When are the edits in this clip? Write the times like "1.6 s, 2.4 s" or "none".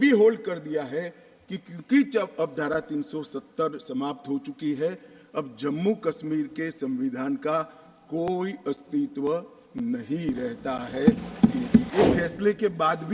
11.9 s